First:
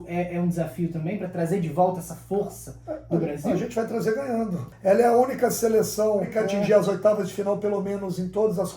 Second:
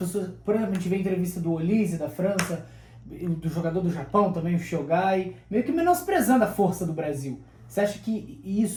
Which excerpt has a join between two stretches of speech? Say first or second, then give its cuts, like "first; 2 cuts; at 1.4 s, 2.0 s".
first; 2 cuts; at 4.6 s, 6.3 s